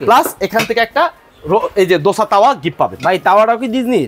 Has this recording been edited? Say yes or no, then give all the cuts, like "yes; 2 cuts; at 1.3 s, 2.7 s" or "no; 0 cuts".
no; 0 cuts